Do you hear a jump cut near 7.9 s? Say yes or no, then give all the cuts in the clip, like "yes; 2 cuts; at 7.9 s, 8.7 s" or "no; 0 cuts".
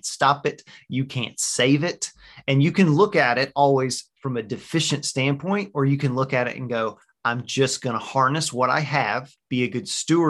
no; 1 cut; at 9.3 s